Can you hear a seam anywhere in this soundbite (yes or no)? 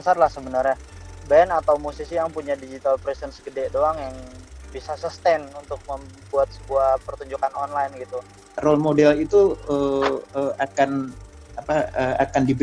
yes